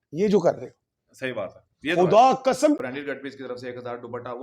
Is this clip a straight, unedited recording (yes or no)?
no